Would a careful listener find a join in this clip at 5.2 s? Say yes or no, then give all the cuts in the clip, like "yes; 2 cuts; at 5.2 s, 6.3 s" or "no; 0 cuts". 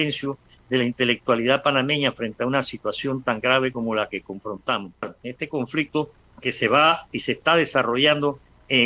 yes; 1 cut; at 5.2 s